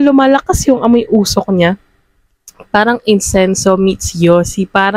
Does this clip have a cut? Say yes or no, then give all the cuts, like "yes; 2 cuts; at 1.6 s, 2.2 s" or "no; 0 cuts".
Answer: no; 0 cuts